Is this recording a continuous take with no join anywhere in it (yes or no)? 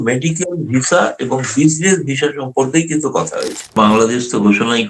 no